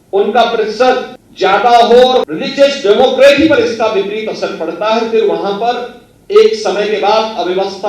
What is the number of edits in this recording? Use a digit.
2